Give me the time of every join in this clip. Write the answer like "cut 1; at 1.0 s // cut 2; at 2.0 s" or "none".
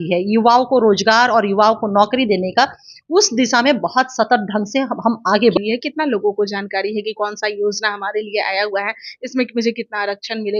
cut 1; at 5.6 s